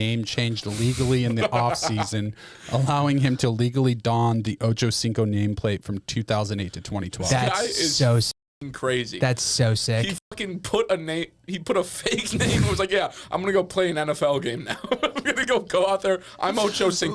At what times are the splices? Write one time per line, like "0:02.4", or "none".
none